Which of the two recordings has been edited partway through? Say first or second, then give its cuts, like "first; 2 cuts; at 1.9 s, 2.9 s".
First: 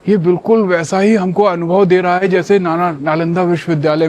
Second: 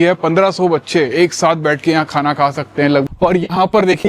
second; 1 cut; at 3.1 s